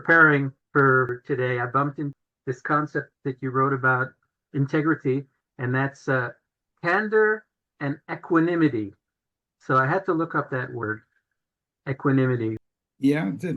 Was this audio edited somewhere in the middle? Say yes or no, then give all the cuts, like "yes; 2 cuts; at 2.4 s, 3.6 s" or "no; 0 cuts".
yes; 5 cuts; at 0.9 s, 2.2 s, 3.1 s, 4.4 s, 12.6 s